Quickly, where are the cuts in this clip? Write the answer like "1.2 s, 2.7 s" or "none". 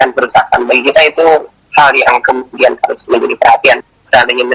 1.6 s